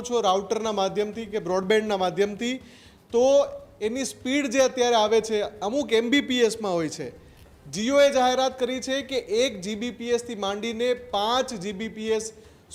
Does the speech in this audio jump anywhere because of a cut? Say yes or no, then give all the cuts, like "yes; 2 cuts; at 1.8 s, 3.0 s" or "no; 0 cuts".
no; 0 cuts